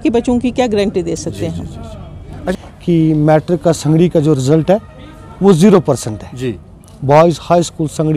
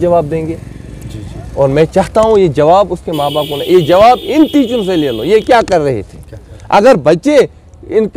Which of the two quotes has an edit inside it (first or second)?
first